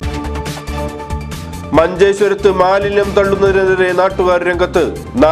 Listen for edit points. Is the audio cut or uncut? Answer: cut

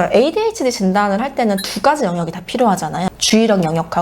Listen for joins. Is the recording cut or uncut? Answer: uncut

